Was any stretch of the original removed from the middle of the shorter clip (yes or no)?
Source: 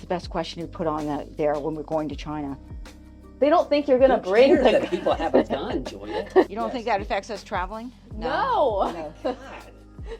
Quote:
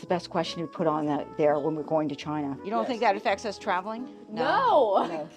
yes